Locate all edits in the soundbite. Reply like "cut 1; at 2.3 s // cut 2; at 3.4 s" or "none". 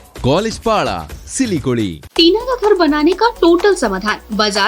cut 1; at 2.0 s